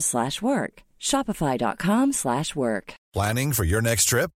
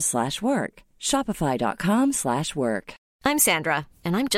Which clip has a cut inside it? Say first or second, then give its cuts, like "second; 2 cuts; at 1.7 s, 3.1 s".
first; 1 cut; at 3.0 s